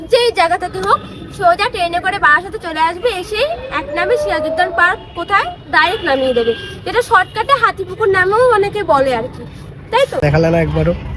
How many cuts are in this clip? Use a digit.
1